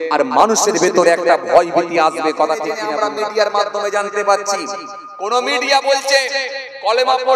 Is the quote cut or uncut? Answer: cut